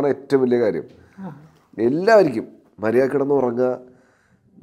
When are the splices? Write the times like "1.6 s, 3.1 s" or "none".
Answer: none